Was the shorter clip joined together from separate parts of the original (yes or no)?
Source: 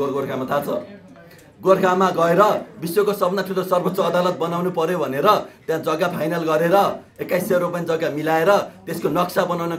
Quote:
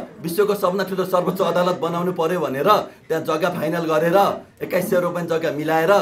no